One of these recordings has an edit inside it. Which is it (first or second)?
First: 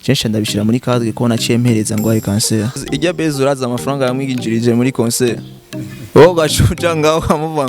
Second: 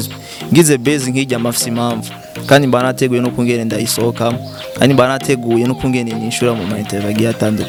first